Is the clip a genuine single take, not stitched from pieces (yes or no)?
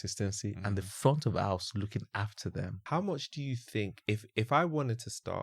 no